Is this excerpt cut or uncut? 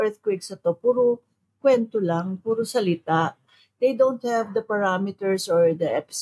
uncut